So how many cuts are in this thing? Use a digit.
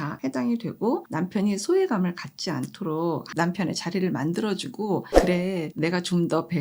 3